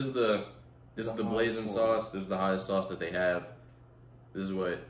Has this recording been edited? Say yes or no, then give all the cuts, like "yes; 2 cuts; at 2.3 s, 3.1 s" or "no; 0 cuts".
no; 0 cuts